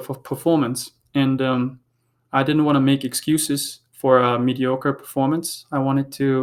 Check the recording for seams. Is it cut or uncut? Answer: uncut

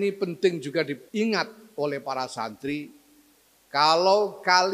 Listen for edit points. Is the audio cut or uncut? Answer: cut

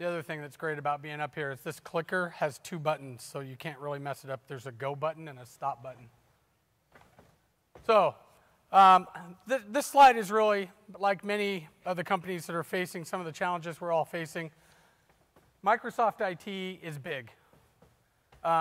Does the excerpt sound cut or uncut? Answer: uncut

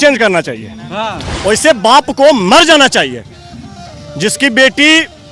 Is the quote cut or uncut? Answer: cut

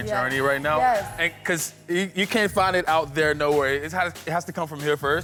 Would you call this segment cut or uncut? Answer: uncut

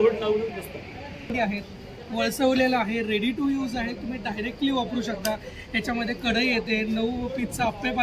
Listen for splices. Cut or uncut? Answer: cut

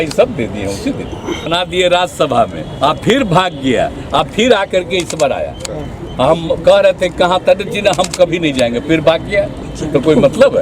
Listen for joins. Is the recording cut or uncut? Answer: cut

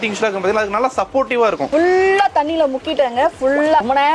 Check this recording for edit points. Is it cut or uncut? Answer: cut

